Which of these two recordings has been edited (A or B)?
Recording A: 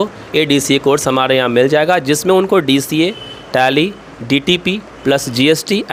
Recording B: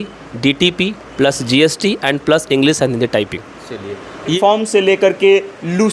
B